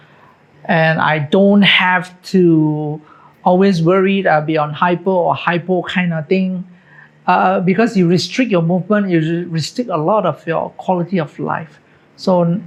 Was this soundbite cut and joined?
no; 0 cuts

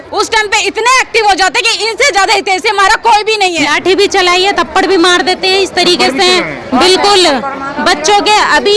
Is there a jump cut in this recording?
yes; 1 cut; at 3.6 s

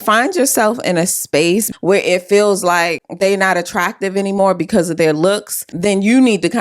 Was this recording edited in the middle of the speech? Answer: yes; 3 cuts; at 1.7 s, 3.0 s, 5.6 s

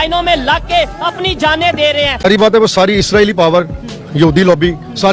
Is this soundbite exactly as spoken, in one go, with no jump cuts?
no; 1 cut; at 2.2 s

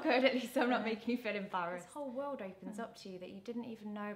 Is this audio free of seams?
no; 1 cut; at 1.9 s

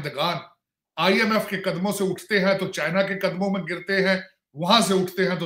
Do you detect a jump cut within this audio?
no; 0 cuts

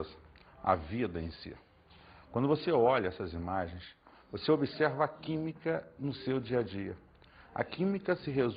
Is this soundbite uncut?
no; 1 cut; at 6.2 s

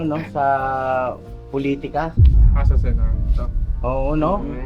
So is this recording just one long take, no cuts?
yes; 0 cuts

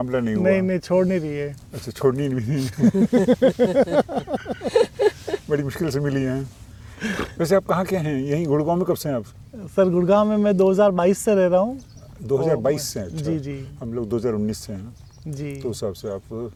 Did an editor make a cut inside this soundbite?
no; 0 cuts

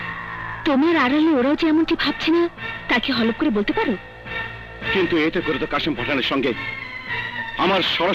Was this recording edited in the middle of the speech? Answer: no; 0 cuts

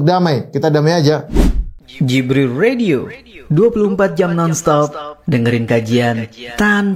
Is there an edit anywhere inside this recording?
yes; 1 cut; at 1.3 s

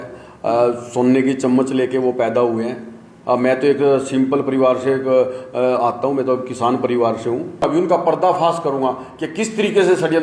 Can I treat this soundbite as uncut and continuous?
no; 1 cut; at 7.6 s

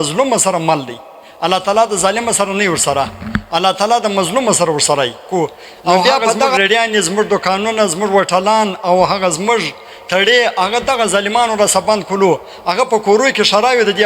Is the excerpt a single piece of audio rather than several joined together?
no; 1 cut; at 6.6 s

